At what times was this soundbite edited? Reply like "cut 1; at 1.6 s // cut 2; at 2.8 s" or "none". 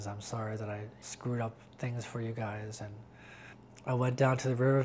cut 1; at 1.0 s // cut 2; at 3.7 s